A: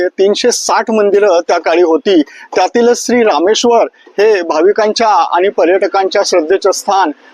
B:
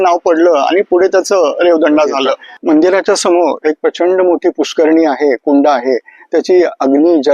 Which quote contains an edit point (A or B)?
B